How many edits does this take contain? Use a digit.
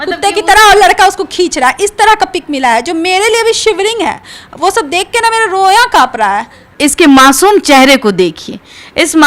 0